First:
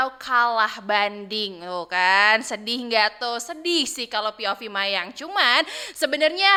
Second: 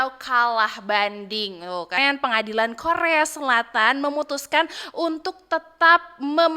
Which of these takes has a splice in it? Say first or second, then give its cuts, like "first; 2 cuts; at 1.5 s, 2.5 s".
second; 1 cut; at 2.0 s